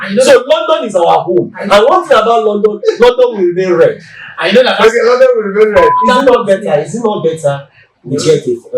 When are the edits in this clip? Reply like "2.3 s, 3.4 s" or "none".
6.0 s